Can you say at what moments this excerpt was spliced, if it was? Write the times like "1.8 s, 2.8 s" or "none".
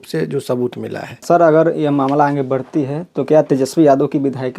1.2 s